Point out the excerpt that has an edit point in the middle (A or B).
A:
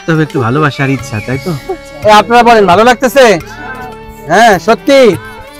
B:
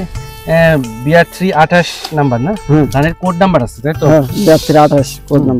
A